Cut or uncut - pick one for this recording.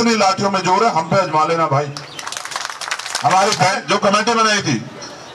cut